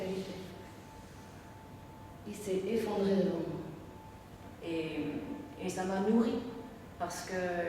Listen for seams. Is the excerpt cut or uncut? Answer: cut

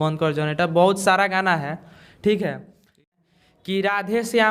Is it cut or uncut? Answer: cut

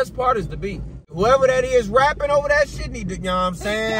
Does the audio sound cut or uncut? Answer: cut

